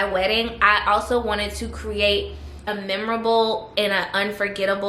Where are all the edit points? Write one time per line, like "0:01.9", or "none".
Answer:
0:02.7